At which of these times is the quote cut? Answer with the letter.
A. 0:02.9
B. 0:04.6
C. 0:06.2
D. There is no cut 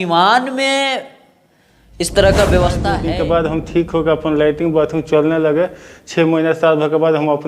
A